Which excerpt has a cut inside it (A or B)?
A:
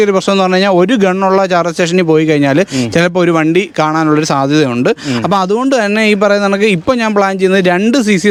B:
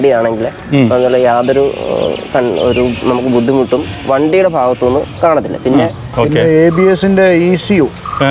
B